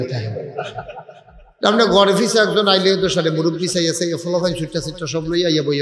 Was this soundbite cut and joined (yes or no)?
no